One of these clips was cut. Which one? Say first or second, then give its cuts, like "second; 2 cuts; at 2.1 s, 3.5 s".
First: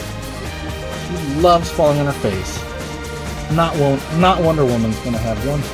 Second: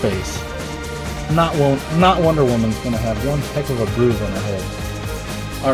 first; 1 cut; at 1.1 s